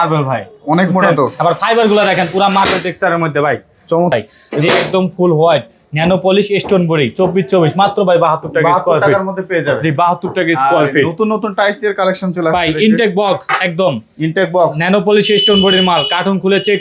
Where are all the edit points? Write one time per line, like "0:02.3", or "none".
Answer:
0:04.1